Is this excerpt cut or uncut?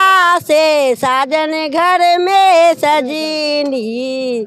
uncut